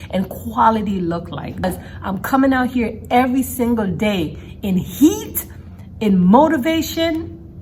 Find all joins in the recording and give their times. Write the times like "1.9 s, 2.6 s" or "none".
1.6 s

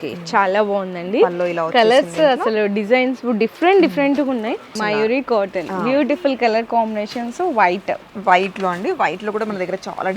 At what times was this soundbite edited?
4.7 s

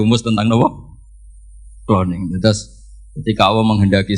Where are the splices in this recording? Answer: none

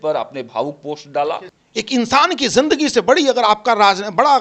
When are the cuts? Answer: 1.6 s

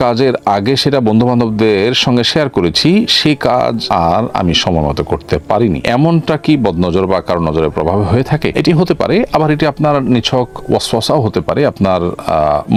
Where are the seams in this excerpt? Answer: none

